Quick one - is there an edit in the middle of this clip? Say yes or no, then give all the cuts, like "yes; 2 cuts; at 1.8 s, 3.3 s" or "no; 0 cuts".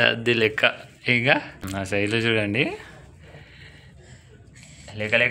yes; 1 cut; at 1.7 s